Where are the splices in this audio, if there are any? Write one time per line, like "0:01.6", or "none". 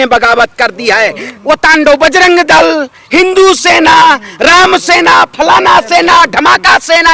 0:01.3